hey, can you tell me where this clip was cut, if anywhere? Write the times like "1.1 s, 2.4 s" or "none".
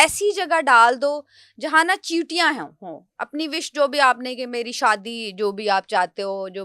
none